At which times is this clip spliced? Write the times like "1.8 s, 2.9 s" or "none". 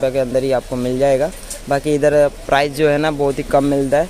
none

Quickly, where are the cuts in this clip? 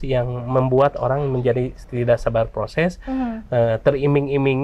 1.8 s

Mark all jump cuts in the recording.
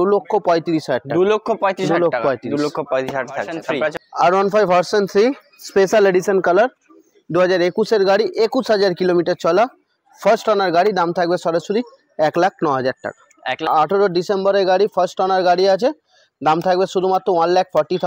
4.0 s, 13.6 s

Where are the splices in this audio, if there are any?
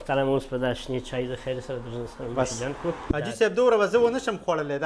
3.1 s

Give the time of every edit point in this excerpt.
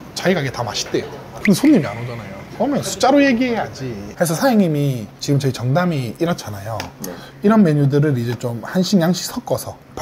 4.0 s

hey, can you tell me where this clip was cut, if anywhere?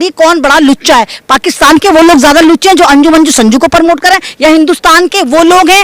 none

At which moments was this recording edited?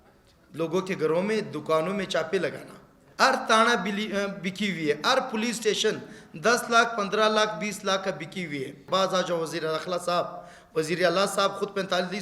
3.0 s, 8.8 s

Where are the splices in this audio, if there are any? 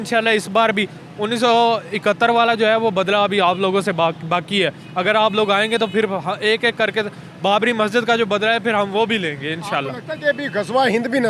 none

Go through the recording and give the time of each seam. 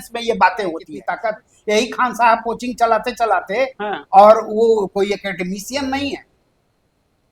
0.9 s

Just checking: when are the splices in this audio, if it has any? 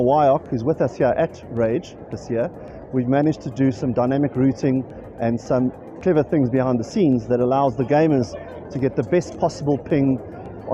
none

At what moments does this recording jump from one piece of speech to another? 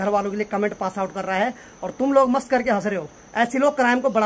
3.1 s

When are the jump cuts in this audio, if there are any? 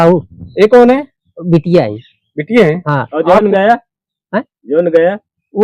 none

